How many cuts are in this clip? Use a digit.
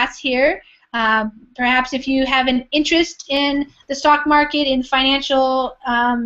0